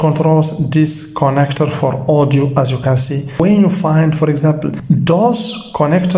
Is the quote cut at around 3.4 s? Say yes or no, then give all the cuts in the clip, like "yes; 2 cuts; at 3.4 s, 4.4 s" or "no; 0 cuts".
yes; 2 cuts; at 3.4 s, 4.8 s